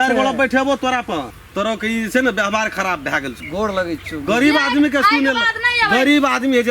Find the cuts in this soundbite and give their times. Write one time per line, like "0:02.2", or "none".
0:01.4
0:03.4